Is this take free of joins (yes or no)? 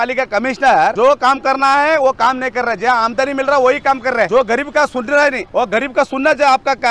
no